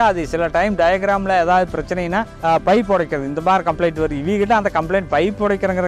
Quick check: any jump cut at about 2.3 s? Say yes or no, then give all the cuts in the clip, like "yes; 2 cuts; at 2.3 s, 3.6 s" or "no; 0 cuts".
yes; 1 cut; at 2.3 s